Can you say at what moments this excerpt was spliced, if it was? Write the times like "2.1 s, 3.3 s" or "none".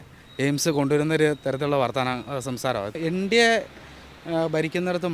3.0 s